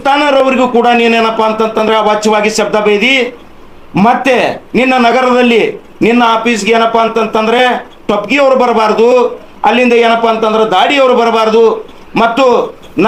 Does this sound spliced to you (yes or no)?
no